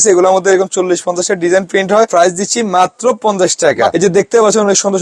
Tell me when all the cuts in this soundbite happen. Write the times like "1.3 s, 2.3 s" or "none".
2.1 s, 3.9 s